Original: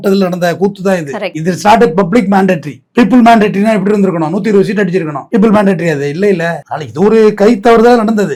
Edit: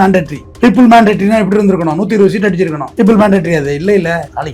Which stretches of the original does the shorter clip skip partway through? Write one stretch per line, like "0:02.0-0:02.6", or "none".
none